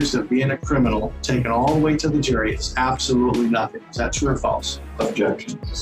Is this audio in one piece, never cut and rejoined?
yes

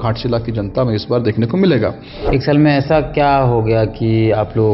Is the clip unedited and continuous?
no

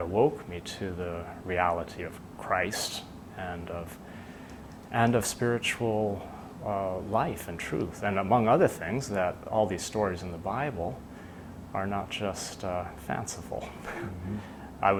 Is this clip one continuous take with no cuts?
yes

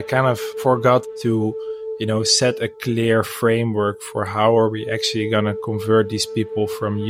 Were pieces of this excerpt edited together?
yes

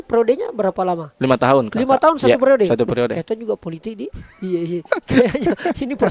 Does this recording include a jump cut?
no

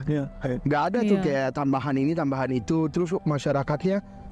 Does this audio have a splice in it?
no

